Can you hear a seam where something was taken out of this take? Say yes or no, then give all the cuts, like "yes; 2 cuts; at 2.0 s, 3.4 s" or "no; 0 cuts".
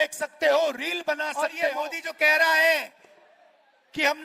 yes; 1 cut; at 1.6 s